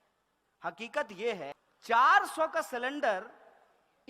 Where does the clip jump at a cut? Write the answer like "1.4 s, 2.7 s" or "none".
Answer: 1.6 s